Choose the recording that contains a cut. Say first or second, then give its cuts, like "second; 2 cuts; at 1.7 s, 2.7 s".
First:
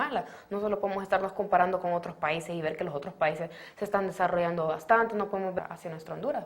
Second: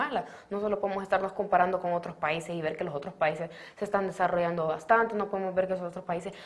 second; 1 cut; at 5.5 s